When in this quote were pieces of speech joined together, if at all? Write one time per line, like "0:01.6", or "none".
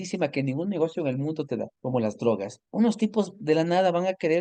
0:01.7
0:02.6